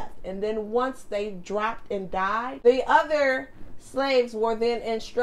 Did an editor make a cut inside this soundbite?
yes; 1 cut; at 2.4 s

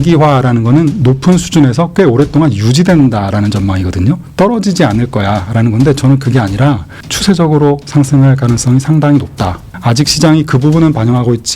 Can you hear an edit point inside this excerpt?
no; 0 cuts

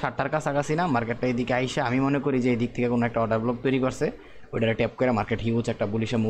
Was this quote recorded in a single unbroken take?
yes; 0 cuts

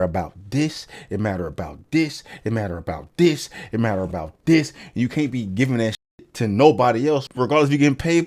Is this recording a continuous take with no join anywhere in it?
no; 1 cut; at 7.3 s

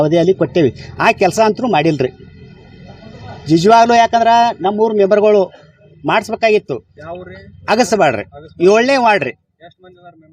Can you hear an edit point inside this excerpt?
no; 0 cuts

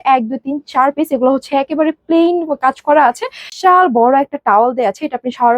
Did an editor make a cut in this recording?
yes; 1 cut; at 3.5 s

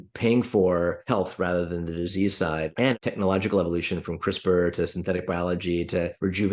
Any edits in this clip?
yes; 2 cuts; at 1.0 s, 2.9 s

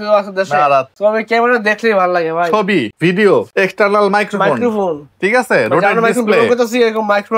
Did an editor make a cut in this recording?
no; 0 cuts

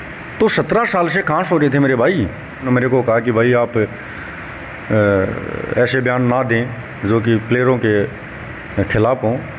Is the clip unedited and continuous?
no; 1 cut; at 2.7 s

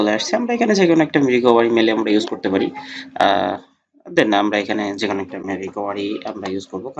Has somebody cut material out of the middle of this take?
no; 0 cuts

